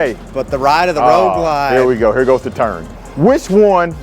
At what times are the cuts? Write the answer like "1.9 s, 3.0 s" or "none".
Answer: 2.8 s